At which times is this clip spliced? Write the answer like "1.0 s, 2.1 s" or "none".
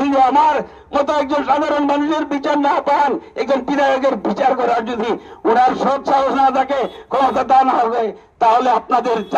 none